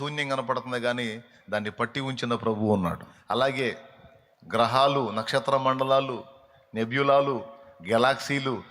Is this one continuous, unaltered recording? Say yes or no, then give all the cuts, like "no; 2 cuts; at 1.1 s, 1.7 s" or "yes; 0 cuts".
no; 1 cut; at 3.1 s